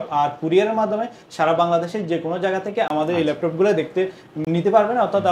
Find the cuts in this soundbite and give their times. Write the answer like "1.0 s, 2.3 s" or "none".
none